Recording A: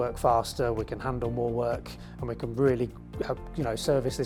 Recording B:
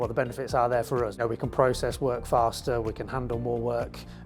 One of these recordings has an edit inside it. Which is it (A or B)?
B